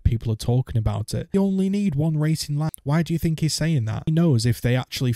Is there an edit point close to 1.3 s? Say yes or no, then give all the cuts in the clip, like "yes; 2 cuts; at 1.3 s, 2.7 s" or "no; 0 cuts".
yes; 3 cuts; at 1.3 s, 2.8 s, 4.1 s